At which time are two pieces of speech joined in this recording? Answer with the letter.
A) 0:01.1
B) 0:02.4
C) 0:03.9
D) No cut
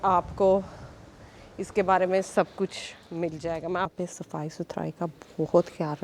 C